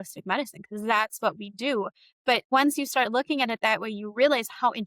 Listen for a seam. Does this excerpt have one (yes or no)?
yes